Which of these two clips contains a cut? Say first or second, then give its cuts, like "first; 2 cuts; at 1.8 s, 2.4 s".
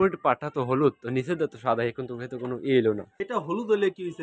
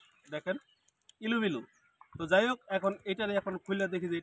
first; 1 cut; at 3.1 s